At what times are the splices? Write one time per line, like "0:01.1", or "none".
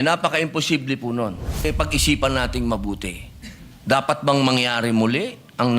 0:01.7